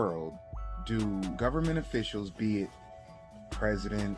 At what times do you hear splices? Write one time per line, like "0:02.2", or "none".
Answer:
0:01.3